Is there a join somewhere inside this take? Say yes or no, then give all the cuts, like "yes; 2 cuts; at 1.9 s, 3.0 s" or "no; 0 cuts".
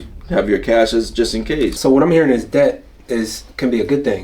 yes; 1 cut; at 1.8 s